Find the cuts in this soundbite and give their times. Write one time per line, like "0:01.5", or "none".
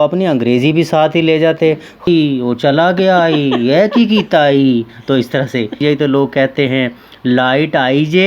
0:02.1
0:05.8